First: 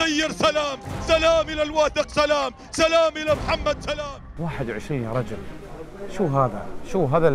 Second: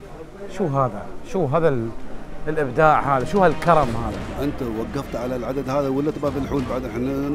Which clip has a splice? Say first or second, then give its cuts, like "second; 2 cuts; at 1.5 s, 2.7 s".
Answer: first; 1 cut; at 4.2 s